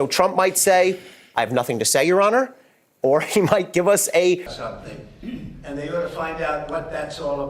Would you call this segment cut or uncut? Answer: cut